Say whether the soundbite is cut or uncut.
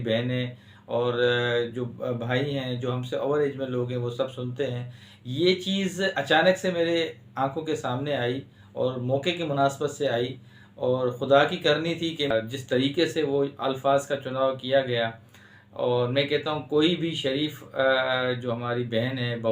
cut